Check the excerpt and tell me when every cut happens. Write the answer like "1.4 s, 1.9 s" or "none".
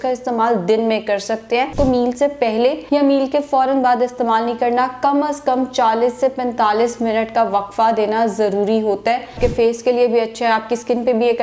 1.7 s, 2.8 s, 9.3 s